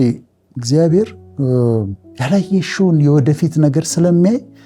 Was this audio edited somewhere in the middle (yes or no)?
no